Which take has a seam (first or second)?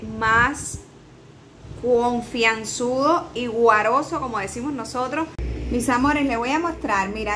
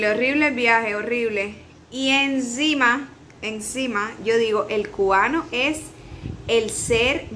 first